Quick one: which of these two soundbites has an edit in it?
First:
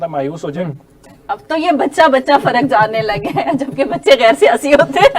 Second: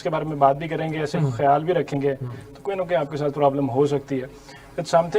first; 1 cut; at 1.1 s

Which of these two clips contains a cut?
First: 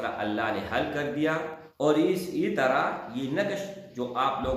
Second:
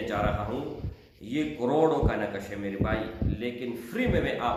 first; 1 cut; at 1.6 s

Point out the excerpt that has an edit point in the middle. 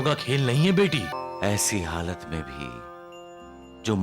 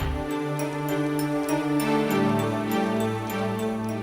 first; 1 cut; at 1.1 s

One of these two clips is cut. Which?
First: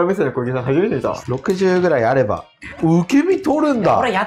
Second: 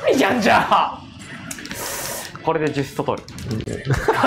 first; 1 cut; at 1.2 s

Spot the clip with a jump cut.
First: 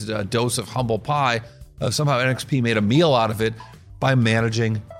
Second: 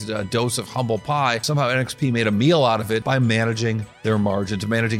second; 2 cuts; at 1.5 s, 3.0 s

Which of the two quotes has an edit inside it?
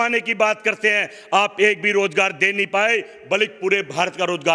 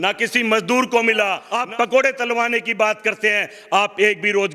second; 1 cut; at 1.5 s

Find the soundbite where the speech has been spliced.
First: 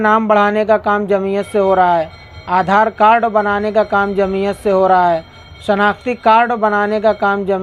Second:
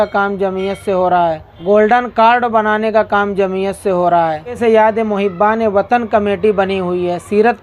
second; 2 cuts; at 1.5 s, 4.6 s

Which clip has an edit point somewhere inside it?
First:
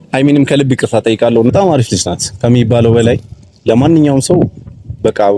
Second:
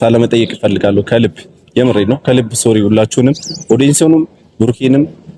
first; 1 cut; at 1.5 s

